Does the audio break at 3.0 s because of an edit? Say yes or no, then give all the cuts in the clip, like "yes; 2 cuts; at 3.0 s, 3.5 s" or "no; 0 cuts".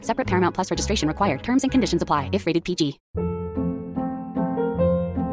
yes; 1 cut; at 3.0 s